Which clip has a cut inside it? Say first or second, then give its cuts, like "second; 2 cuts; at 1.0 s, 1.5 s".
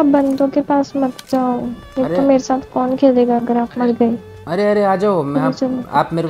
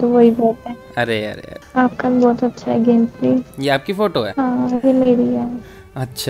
second; 2 cuts; at 1.5 s, 4.3 s